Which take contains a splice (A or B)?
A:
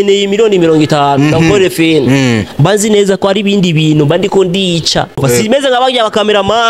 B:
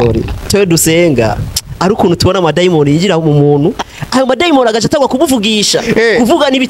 A